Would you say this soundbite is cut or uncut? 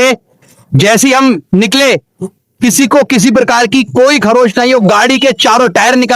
uncut